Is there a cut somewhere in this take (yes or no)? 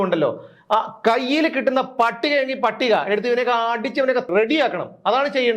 yes